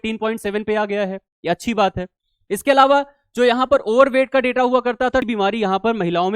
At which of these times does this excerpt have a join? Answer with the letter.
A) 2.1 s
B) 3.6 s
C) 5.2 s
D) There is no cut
C